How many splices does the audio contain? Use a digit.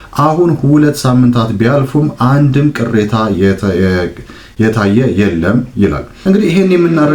1